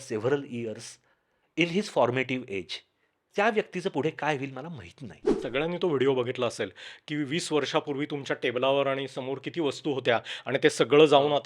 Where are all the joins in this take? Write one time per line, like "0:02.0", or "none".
0:03.2
0:05.3